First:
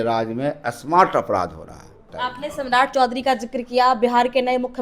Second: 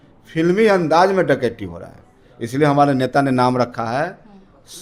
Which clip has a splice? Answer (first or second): first